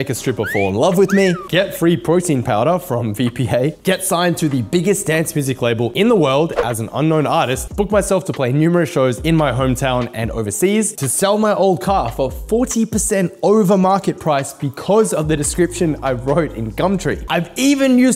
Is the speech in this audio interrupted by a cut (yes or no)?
yes